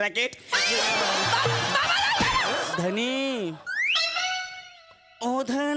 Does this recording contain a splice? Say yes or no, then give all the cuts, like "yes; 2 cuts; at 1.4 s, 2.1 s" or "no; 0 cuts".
yes; 1 cut; at 2.7 s